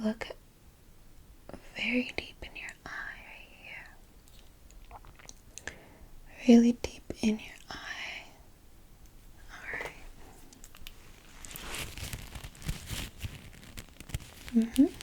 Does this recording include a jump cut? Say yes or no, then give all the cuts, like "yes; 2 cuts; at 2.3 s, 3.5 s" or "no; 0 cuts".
yes; 1 cut; at 11.2 s